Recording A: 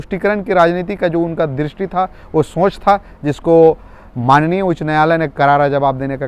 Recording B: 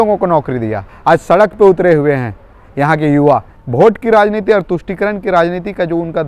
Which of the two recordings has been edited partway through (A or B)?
B